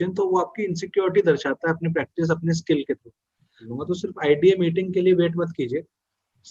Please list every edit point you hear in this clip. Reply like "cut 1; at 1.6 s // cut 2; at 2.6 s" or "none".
cut 1; at 3.7 s

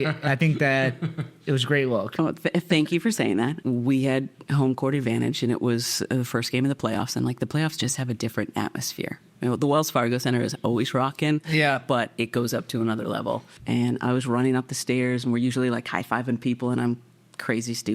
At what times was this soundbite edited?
cut 1; at 3.6 s // cut 2; at 13.5 s

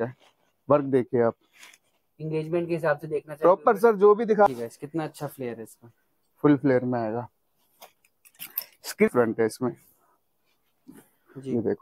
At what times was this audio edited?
cut 1; at 4.5 s // cut 2; at 9.1 s

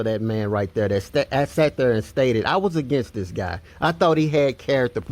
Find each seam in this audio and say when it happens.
cut 1; at 2.9 s

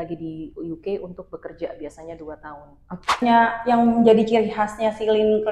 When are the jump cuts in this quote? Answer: cut 1; at 3.2 s

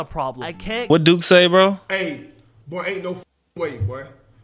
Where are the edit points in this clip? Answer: cut 1; at 0.9 s

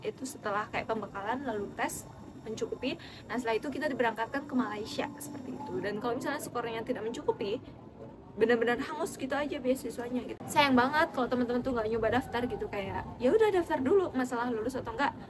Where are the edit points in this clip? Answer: cut 1; at 10.4 s

